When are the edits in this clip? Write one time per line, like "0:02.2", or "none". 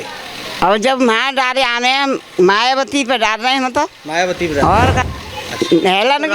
0:05.0